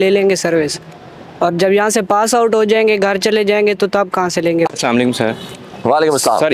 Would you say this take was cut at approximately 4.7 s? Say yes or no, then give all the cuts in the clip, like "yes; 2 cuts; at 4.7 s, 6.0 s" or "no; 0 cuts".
yes; 1 cut; at 4.7 s